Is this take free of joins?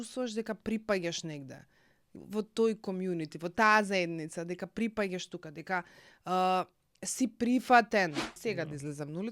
no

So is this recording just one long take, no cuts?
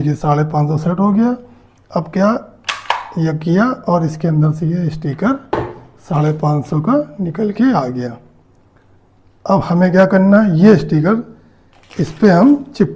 yes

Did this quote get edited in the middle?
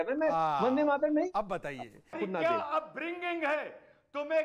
yes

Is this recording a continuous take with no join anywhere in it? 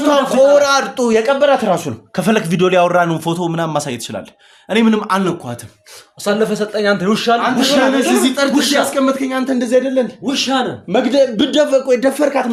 yes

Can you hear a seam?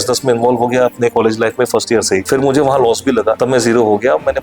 yes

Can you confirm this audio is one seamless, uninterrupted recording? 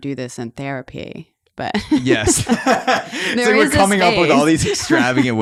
yes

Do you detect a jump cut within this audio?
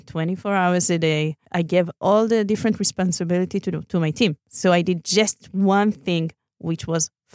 yes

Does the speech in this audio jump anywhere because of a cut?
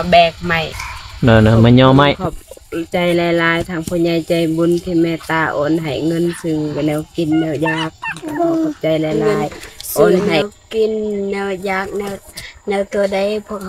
yes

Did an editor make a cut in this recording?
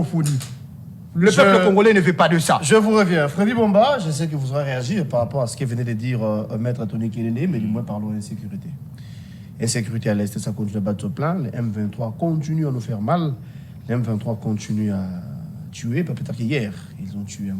no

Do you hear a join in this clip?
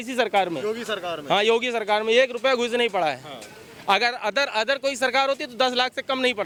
no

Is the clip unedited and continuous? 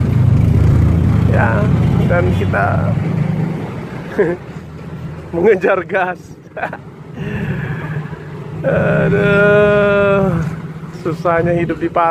yes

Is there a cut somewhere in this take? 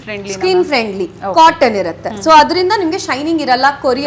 no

